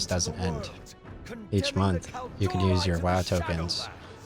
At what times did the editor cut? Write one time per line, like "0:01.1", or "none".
none